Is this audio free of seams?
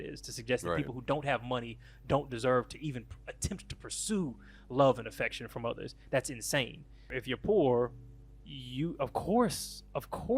no; 1 cut; at 7.2 s

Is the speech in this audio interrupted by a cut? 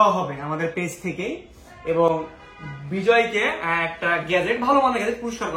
no; 0 cuts

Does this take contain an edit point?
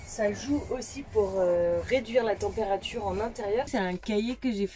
yes; 1 cut; at 3.7 s

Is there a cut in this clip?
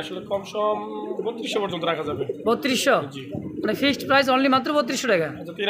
no; 0 cuts

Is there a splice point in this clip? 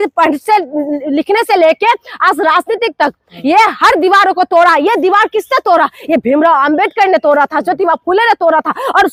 no; 0 cuts

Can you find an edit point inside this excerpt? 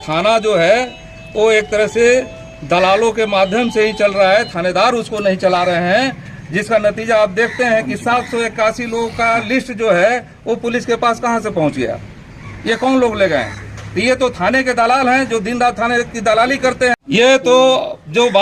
yes; 1 cut; at 17.0 s

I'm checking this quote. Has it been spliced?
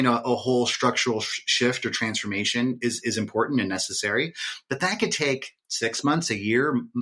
no; 0 cuts

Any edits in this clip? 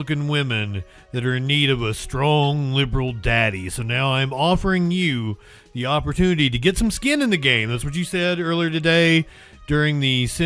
no; 0 cuts

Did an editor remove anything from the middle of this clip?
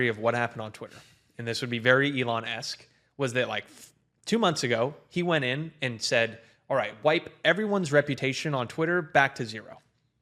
no; 0 cuts

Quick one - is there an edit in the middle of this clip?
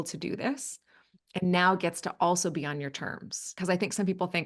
yes; 1 cut; at 3.5 s

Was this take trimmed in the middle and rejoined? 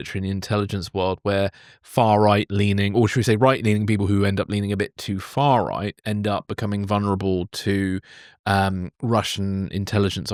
no; 0 cuts

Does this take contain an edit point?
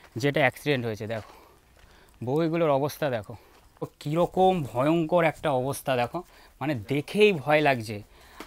yes; 1 cut; at 4.0 s

